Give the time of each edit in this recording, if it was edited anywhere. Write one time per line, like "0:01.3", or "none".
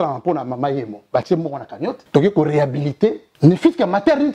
0:02.0
0:03.3